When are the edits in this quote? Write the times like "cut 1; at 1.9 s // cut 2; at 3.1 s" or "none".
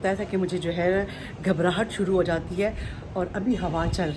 none